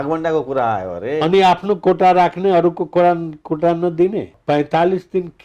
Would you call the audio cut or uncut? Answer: cut